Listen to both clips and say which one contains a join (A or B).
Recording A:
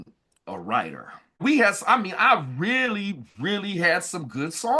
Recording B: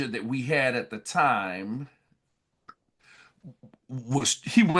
A